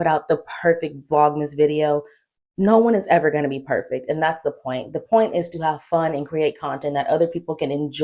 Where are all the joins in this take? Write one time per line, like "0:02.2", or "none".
none